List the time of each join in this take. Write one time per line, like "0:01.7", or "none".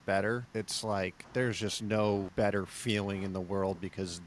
0:01.0
0:02.3